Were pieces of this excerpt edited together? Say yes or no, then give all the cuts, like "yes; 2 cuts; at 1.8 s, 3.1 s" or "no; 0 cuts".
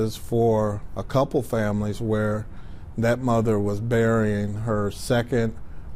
no; 0 cuts